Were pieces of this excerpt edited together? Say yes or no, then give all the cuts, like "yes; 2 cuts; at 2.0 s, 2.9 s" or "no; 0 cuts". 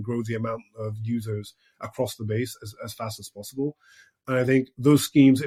no; 0 cuts